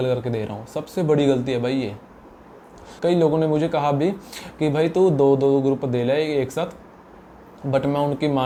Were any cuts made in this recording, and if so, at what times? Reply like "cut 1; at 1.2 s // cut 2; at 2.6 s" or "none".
none